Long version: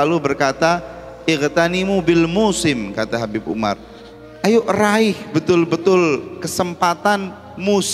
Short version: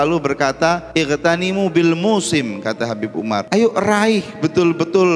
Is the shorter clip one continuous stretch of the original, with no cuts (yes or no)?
no